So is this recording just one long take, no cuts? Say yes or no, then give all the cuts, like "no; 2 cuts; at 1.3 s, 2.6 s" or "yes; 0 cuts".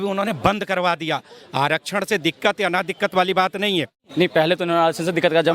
no; 1 cut; at 4.1 s